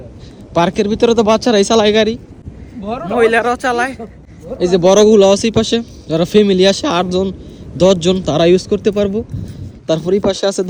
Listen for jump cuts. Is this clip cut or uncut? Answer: uncut